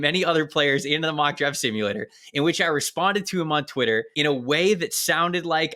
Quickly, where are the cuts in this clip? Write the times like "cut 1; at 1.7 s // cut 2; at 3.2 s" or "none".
cut 1; at 4.1 s